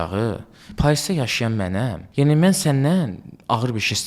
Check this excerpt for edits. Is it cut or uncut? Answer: cut